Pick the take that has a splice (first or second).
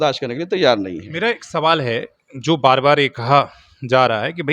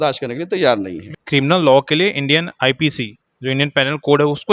second